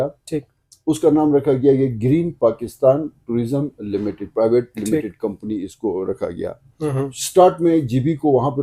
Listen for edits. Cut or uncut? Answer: uncut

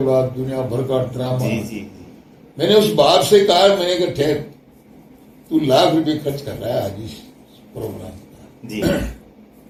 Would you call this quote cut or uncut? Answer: uncut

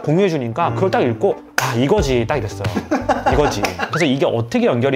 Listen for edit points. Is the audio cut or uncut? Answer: uncut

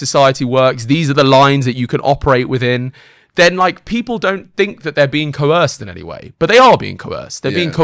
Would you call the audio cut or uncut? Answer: uncut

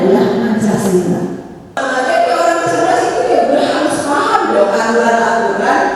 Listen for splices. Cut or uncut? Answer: cut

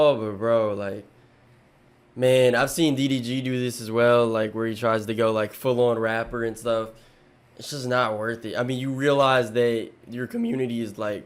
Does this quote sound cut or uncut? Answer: uncut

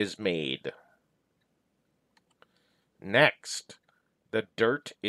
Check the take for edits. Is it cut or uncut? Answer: cut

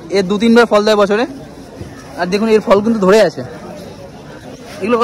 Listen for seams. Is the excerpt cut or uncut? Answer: uncut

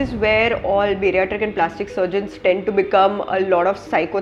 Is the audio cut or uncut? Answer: uncut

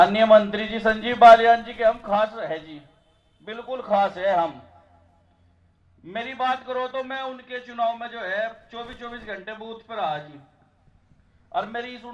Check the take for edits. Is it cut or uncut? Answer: uncut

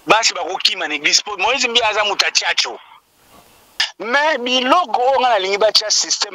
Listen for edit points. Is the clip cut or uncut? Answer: cut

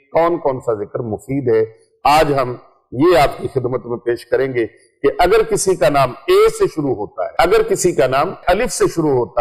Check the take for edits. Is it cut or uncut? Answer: cut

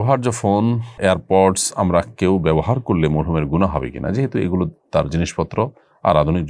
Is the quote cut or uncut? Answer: uncut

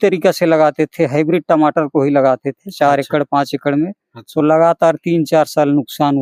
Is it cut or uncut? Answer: uncut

